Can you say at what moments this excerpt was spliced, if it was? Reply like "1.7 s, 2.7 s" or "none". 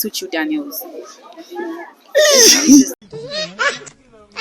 2.9 s